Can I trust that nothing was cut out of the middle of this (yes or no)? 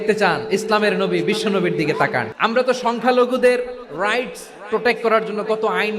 no